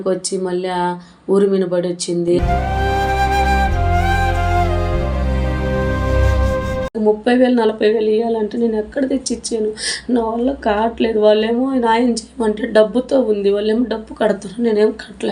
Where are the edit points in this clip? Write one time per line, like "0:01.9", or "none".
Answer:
0:06.9